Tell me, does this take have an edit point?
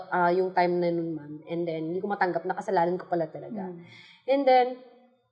no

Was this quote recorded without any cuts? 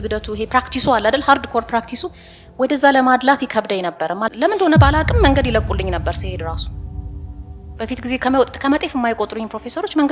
no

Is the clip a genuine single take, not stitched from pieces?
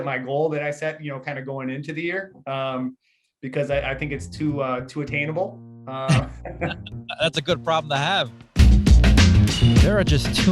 no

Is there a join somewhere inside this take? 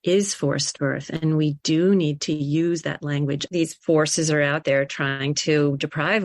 yes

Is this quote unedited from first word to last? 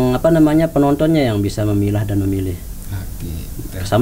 yes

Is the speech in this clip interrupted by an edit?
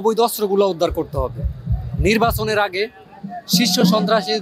no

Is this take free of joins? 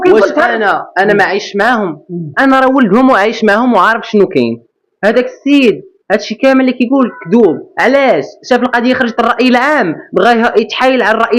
yes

